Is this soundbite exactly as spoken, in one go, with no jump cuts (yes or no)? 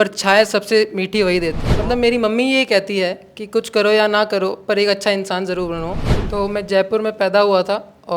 no